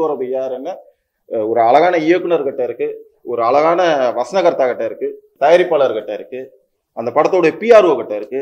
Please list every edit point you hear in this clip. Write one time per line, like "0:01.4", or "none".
0:05.2